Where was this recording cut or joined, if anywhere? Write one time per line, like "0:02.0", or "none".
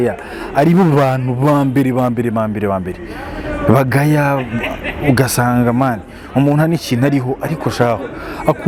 none